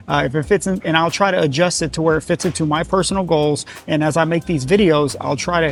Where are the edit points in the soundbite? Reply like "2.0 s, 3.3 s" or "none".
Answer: none

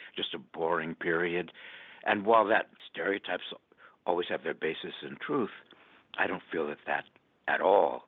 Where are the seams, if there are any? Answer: 2.8 s

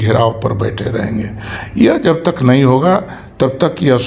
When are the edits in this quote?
none

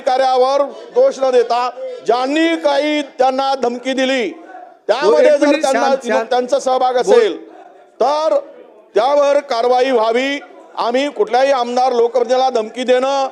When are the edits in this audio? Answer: none

